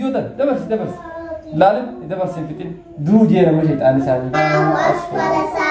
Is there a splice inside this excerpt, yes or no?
yes